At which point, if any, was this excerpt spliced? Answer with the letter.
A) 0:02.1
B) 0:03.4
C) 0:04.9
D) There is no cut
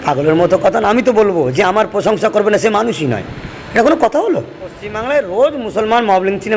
C